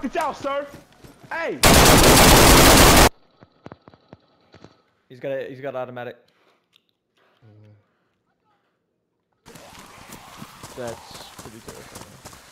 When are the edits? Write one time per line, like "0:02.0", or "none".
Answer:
0:09.5